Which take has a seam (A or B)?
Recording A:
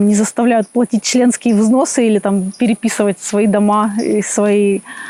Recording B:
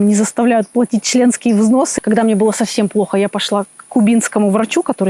B